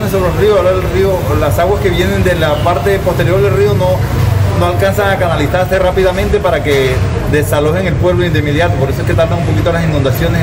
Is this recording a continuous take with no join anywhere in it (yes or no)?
yes